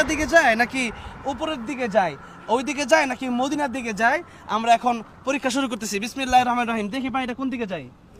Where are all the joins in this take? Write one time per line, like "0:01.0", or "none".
none